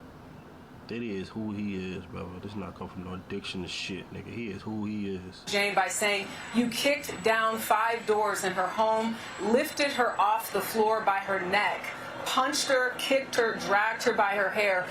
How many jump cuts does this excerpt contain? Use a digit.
1